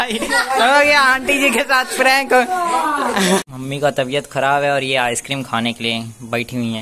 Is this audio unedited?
no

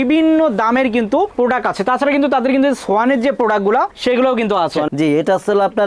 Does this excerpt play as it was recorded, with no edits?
no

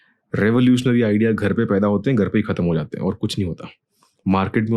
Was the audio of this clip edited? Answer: no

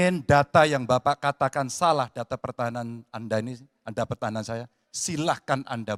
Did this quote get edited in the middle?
no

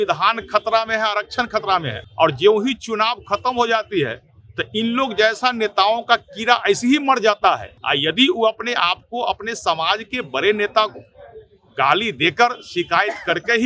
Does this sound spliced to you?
yes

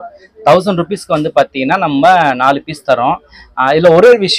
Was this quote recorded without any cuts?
yes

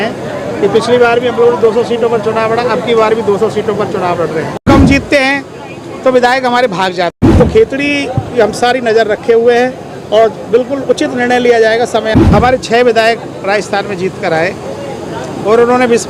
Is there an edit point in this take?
yes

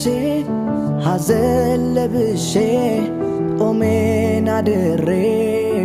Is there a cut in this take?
no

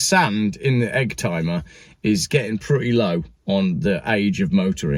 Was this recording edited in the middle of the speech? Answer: no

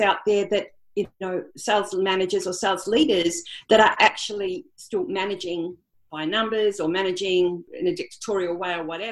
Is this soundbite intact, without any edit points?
no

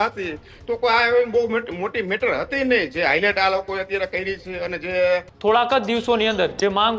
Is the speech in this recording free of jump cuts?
no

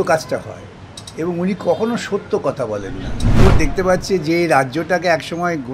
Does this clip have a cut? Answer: yes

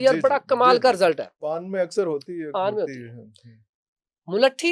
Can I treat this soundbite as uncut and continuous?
yes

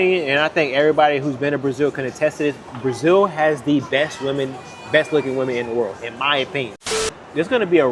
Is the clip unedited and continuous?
no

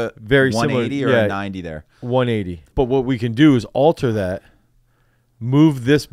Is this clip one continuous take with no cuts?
no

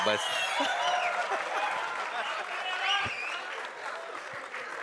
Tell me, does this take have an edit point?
no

